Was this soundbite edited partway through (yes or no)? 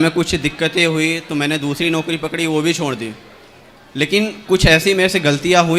no